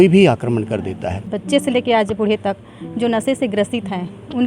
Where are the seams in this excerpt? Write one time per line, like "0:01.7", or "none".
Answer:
0:01.3